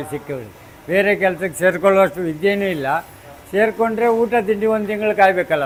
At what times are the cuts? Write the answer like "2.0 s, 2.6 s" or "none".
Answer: none